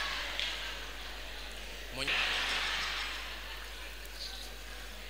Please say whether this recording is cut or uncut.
cut